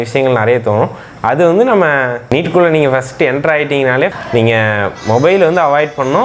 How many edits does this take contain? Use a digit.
1